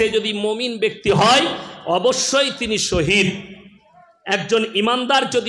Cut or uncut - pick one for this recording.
uncut